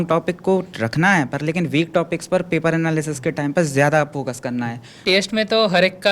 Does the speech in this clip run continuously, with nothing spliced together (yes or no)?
no